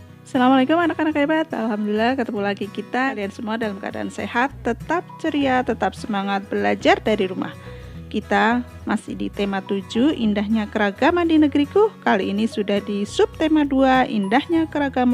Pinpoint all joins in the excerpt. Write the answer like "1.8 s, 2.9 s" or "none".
3.1 s